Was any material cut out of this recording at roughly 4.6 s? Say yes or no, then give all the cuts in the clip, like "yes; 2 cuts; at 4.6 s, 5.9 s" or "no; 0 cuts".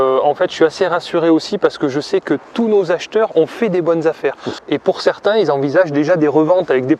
yes; 1 cut; at 4.6 s